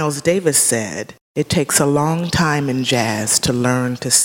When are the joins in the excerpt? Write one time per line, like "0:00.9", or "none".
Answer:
0:01.2